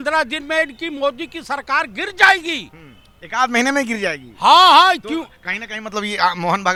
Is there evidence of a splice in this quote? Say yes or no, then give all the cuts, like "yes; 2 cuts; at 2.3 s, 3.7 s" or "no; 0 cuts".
no; 0 cuts